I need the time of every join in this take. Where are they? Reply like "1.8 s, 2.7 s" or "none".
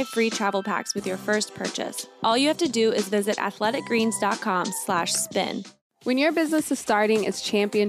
2.0 s, 5.6 s